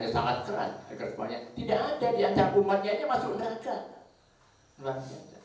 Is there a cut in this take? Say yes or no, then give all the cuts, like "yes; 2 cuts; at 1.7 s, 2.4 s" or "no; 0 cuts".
no; 0 cuts